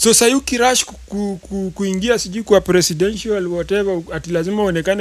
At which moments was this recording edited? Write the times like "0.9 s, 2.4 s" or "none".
none